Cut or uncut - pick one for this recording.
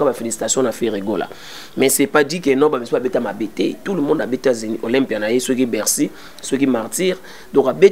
uncut